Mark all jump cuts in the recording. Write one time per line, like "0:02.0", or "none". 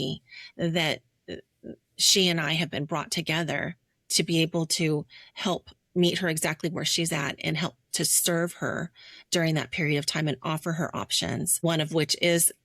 0:11.6